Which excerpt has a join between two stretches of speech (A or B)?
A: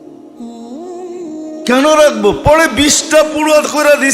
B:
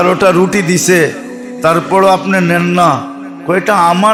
A